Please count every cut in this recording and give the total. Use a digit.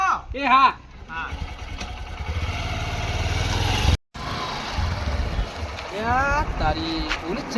1